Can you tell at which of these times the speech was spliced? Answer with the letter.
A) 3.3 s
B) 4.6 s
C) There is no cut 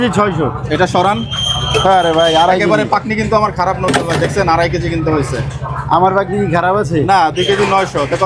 C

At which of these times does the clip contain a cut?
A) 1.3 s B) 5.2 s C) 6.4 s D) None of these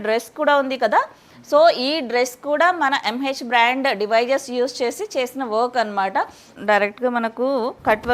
C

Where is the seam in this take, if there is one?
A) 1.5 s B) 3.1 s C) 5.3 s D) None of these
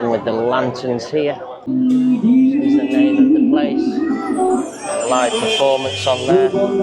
A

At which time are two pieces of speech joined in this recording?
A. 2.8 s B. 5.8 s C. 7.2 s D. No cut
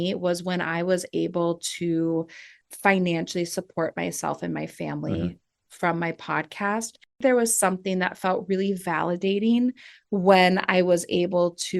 C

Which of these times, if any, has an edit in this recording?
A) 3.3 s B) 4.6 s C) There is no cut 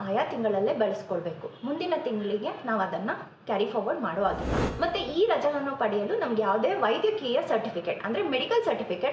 B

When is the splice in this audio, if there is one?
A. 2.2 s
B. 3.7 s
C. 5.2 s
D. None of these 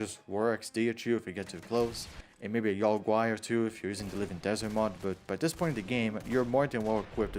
D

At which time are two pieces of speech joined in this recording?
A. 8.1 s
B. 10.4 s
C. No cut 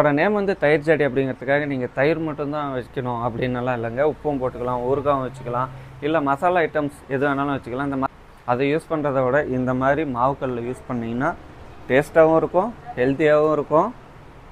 A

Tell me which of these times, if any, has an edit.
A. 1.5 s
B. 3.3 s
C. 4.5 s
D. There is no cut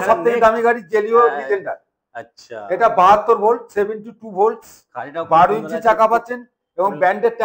D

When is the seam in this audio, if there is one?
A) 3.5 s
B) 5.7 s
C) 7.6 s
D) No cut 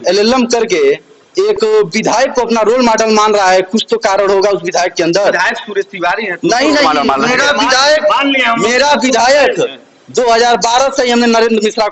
D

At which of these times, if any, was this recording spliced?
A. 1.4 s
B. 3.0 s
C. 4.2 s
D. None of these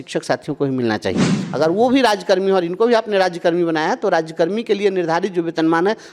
A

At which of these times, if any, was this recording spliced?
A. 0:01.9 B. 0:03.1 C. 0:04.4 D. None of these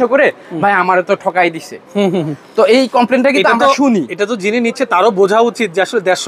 D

